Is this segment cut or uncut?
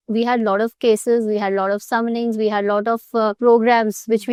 uncut